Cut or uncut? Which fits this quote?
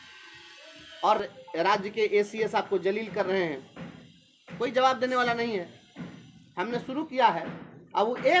cut